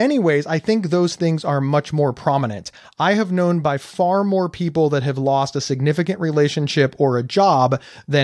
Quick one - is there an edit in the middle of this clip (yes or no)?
no